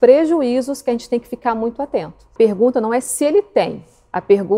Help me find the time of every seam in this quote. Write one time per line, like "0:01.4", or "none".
0:02.3